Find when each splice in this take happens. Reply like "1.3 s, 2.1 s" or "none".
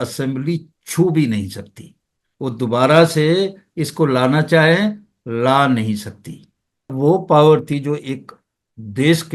6.9 s